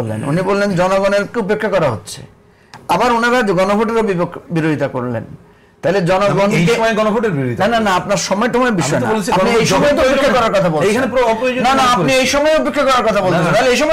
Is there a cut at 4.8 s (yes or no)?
no